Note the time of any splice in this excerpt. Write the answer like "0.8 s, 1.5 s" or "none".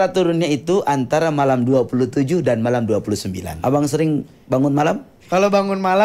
3.5 s, 5.1 s